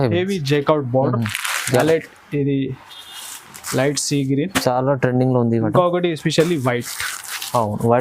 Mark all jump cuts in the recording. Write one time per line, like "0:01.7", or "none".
0:01.8